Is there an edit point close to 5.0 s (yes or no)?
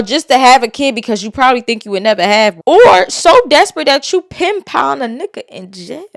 no